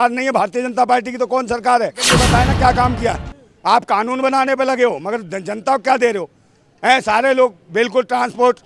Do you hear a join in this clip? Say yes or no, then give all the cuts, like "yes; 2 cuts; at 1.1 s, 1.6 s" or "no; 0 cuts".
yes; 1 cut; at 2.1 s